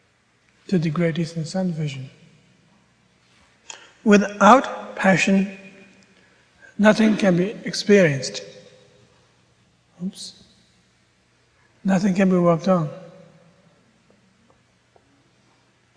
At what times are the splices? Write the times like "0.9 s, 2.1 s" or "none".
8.9 s